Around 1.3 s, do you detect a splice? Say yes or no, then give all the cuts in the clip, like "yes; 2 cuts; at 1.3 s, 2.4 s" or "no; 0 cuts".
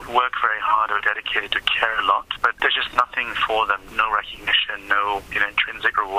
no; 3 cuts; at 2.6 s, 3.8 s, 5.3 s